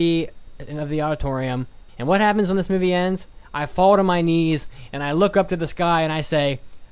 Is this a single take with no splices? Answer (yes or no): no